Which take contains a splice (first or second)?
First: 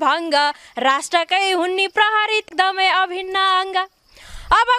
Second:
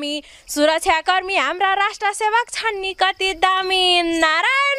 first